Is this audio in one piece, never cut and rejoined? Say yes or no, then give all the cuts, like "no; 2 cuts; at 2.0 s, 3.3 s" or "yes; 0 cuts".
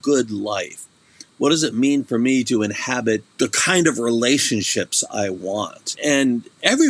no; 2 cuts; at 3.3 s, 6.0 s